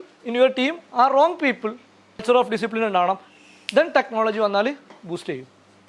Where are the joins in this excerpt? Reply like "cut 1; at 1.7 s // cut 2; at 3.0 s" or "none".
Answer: cut 1; at 2.2 s